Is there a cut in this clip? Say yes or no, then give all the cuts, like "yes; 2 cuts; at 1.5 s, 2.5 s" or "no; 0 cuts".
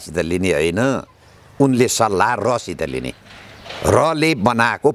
no; 0 cuts